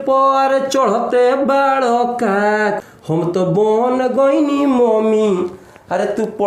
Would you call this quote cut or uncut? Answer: cut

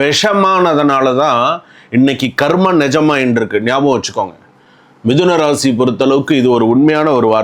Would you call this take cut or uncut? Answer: uncut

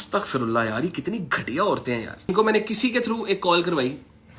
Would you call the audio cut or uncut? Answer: cut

